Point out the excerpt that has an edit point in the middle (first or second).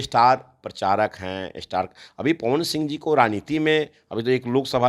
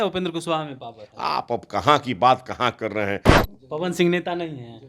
second